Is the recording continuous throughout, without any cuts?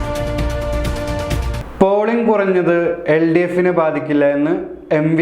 no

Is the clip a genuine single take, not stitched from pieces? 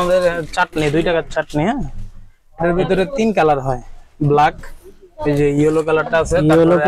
yes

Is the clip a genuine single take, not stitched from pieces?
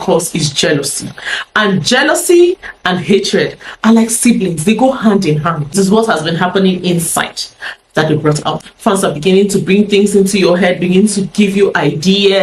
no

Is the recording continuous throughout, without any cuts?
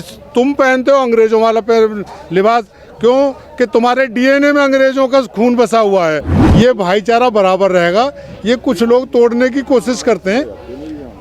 no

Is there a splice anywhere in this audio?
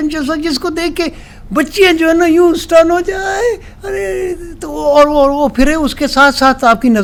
no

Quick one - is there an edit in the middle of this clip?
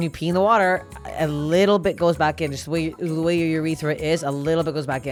no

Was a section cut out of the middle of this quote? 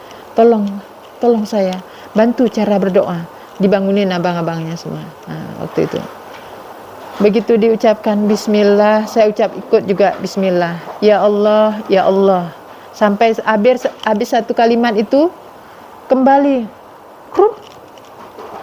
no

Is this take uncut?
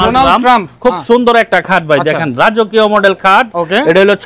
yes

